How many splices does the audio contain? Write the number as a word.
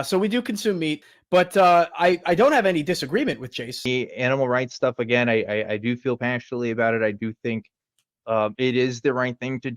two